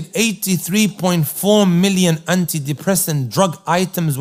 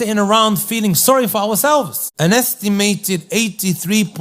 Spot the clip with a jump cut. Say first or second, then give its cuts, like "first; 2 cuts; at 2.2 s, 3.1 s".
second; 1 cut; at 2.0 s